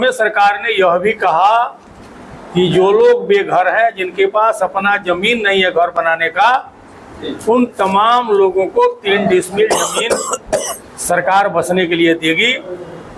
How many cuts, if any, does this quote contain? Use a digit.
0